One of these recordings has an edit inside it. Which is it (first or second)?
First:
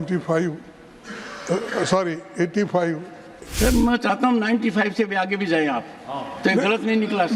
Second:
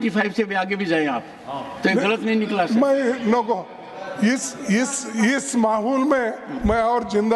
first